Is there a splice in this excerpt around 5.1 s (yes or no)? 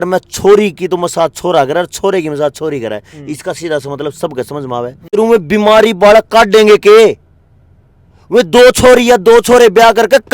yes